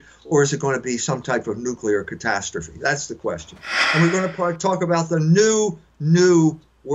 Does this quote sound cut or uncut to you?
cut